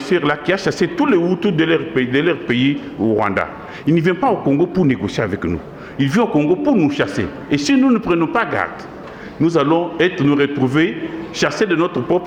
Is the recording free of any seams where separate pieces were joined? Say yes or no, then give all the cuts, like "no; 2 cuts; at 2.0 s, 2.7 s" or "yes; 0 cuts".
yes; 0 cuts